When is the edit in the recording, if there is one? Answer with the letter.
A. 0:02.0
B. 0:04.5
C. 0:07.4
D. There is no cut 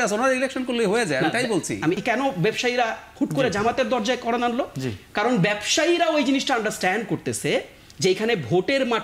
A